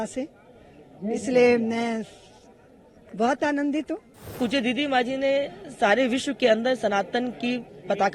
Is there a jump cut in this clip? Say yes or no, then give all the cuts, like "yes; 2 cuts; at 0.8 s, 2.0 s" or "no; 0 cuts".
yes; 1 cut; at 4.4 s